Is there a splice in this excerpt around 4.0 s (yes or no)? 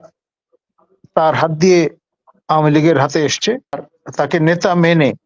yes